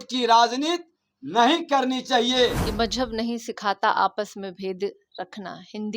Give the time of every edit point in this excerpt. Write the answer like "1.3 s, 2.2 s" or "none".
2.6 s